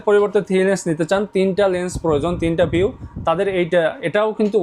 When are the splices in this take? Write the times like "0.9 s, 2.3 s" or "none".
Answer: none